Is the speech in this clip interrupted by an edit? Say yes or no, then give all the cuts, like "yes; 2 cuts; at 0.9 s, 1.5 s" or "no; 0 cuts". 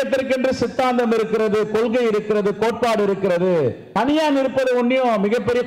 yes; 1 cut; at 3.8 s